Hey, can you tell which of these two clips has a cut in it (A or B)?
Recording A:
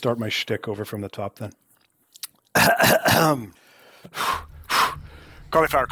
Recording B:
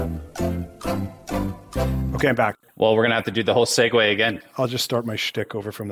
B